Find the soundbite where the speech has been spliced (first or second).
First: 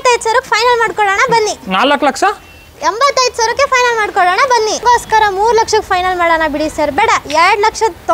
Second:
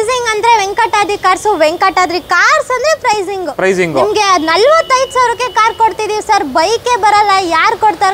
first